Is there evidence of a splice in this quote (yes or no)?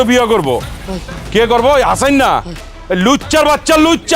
yes